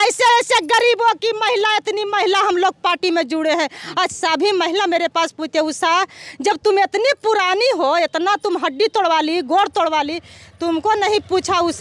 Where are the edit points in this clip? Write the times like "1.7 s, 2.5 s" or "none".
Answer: none